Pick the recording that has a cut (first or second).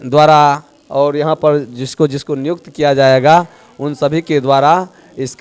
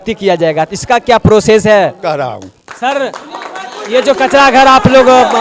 second